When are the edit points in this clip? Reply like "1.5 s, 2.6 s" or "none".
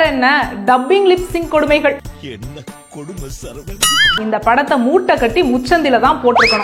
4.2 s